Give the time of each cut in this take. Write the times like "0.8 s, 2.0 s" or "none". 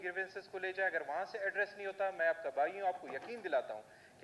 none